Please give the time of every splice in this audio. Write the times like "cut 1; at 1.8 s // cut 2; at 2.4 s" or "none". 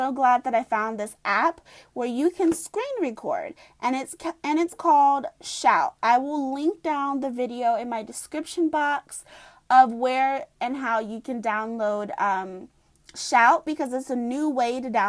cut 1; at 4.7 s